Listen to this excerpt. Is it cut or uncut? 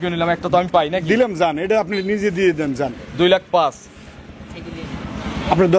uncut